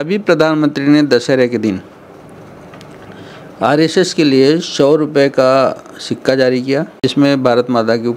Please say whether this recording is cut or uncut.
cut